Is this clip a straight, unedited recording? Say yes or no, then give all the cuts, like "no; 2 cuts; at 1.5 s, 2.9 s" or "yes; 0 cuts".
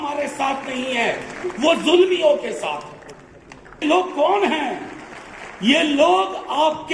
no; 1 cut; at 3.8 s